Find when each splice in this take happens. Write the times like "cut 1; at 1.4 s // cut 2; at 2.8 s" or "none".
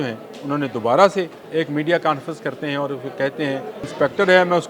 cut 1; at 1.4 s // cut 2; at 3.9 s